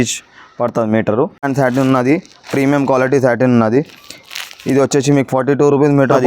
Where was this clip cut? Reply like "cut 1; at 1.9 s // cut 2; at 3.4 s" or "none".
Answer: cut 1; at 1.4 s